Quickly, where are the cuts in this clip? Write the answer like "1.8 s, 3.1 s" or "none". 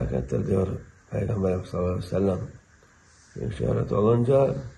1.3 s